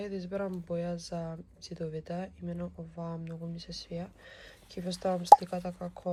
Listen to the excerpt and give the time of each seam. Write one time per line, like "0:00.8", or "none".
none